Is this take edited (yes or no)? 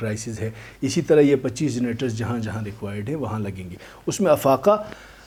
no